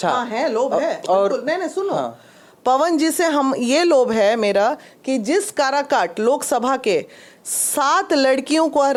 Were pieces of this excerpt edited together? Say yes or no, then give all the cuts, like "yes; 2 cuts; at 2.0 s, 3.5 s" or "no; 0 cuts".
no; 0 cuts